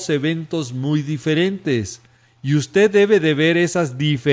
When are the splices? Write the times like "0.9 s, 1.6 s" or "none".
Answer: 1.2 s